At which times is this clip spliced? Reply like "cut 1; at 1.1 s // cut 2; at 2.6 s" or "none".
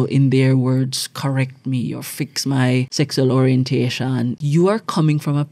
cut 1; at 2.9 s // cut 2; at 4.4 s